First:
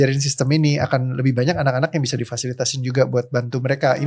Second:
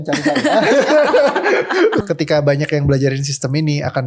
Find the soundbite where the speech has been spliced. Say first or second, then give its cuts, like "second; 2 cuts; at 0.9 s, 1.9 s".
second; 1 cut; at 2.1 s